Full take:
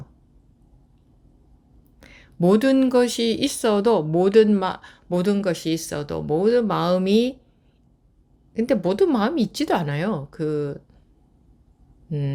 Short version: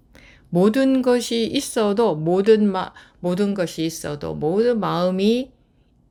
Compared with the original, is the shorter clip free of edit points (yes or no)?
yes